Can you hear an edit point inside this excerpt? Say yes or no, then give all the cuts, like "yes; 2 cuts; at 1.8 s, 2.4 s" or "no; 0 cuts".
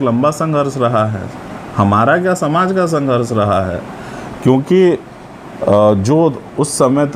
no; 0 cuts